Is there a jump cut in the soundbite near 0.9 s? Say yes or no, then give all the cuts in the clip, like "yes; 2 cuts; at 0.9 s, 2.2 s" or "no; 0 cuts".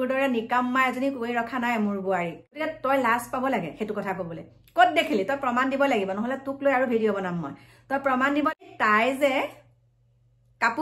no; 2 cuts; at 2.6 s, 8.6 s